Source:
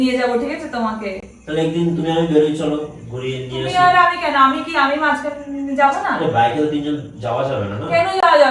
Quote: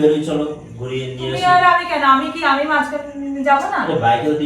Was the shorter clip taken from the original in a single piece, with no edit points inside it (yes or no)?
yes